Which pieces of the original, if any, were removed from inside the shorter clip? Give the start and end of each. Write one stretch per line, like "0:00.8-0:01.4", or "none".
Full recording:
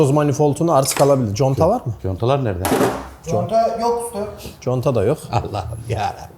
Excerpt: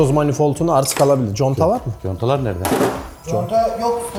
none